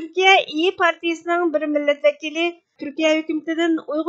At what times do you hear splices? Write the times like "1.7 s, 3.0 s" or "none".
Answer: 2.7 s